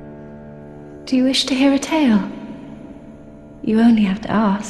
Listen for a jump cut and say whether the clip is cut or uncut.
uncut